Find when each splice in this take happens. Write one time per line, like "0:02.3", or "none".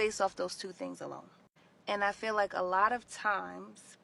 0:02.2